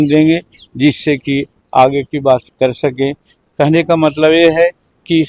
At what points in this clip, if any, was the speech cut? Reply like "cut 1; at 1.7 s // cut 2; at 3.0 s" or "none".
none